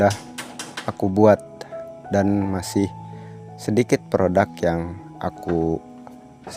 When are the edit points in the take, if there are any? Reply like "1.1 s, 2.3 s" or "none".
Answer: none